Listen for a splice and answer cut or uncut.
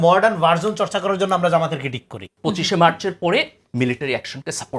cut